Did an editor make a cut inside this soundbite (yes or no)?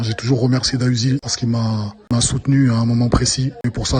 no